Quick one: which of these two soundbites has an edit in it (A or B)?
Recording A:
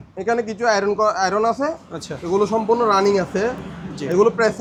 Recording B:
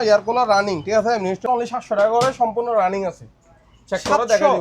B